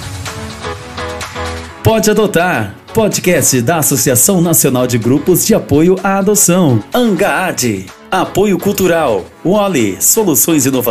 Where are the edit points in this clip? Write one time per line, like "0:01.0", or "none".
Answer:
0:01.8